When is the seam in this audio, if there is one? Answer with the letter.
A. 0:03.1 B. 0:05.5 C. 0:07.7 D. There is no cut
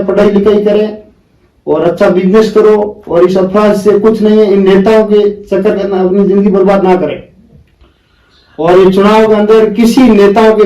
D